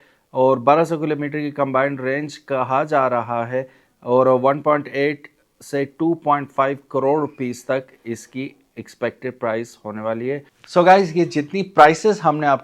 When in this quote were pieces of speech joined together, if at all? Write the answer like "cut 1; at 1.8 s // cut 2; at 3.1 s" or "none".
cut 1; at 10.5 s